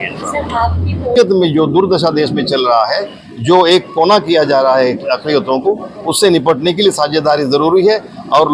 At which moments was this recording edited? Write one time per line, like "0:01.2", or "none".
0:01.1